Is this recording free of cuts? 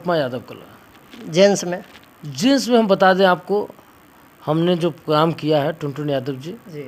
yes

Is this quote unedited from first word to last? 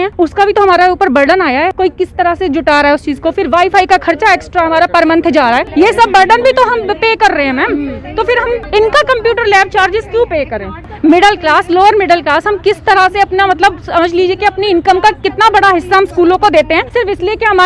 yes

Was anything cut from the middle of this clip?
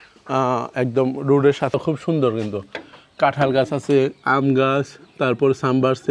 yes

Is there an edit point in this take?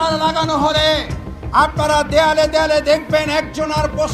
no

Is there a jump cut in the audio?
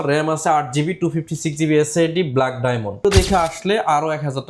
yes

